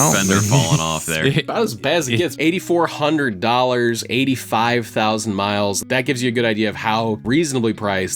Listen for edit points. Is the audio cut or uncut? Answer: cut